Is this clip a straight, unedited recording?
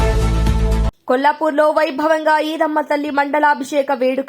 yes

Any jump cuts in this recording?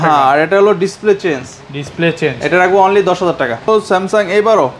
yes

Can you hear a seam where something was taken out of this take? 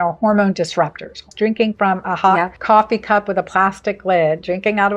yes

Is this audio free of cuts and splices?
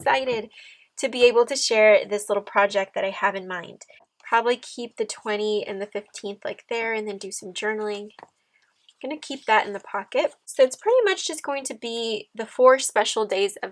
no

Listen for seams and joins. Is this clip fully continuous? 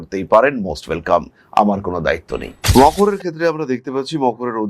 no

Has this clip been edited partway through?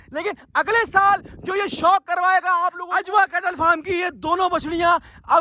yes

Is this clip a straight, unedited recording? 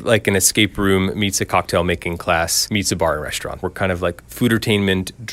no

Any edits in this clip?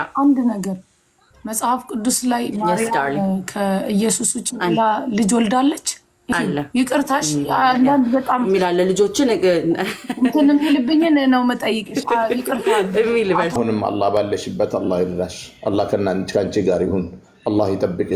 yes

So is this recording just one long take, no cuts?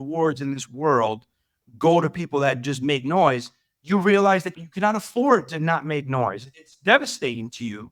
yes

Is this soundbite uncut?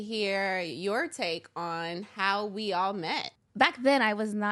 no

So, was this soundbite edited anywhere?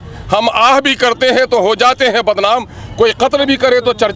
no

